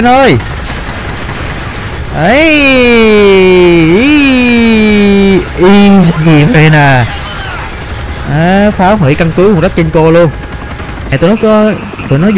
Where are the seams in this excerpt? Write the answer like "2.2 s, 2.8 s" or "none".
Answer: 11.1 s